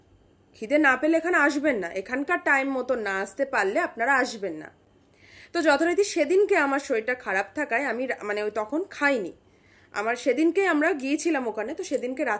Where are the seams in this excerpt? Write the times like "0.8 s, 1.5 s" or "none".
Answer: none